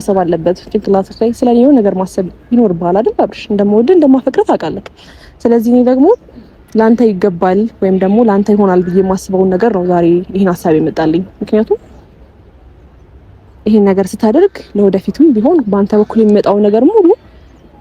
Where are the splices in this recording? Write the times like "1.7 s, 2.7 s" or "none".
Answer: none